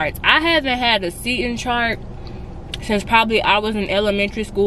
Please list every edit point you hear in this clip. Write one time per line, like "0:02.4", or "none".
none